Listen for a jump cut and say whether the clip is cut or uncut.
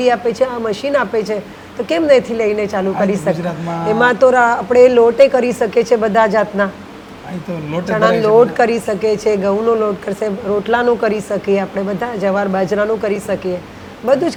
uncut